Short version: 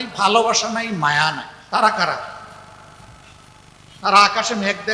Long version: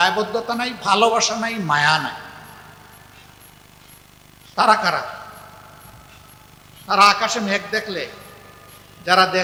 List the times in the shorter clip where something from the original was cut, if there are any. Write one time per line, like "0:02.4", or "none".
0:01.5